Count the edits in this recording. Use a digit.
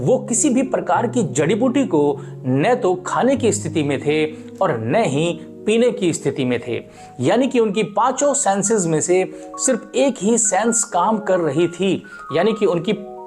0